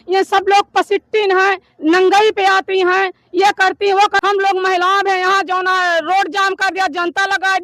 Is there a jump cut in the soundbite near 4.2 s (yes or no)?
yes